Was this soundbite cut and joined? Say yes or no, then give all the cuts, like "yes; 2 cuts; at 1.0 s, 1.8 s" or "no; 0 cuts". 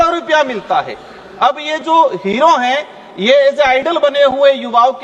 no; 0 cuts